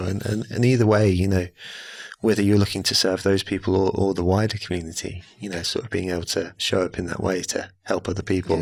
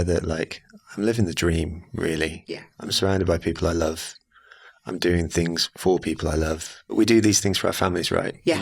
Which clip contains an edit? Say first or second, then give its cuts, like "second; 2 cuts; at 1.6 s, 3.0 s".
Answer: second; 1 cut; at 6.9 s